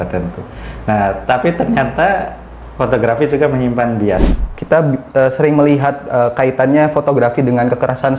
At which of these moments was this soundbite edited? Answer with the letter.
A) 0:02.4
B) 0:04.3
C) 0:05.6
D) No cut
B